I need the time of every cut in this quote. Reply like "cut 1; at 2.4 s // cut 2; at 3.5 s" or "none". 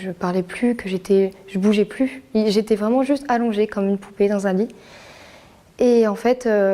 none